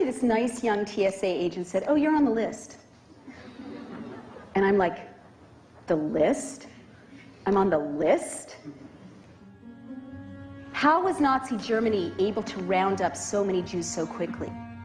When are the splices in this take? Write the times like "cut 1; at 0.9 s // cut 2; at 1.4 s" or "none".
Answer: cut 1; at 7.6 s